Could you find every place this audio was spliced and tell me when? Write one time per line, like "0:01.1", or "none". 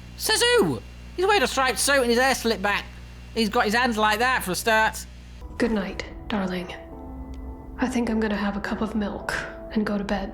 0:05.4